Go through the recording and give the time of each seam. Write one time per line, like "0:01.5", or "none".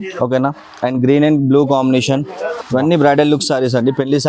0:02.6